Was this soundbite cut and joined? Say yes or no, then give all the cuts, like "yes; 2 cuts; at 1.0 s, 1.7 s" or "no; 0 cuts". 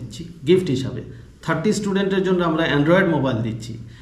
no; 0 cuts